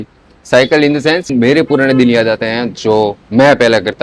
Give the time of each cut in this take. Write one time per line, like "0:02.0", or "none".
0:01.3